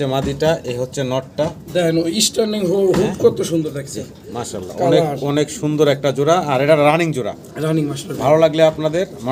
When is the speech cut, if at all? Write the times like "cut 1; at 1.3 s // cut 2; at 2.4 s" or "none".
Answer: none